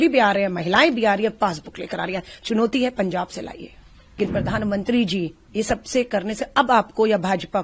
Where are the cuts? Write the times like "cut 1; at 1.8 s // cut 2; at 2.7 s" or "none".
cut 1; at 4.0 s